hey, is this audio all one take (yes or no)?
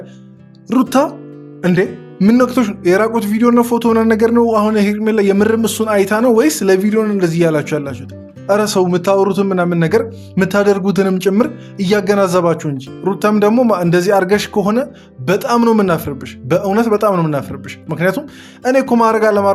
yes